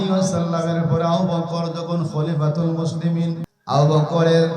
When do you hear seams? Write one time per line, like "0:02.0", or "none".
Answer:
0:03.5

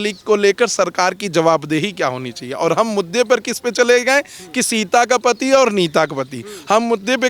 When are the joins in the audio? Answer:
none

